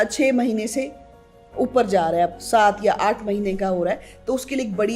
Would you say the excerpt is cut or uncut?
uncut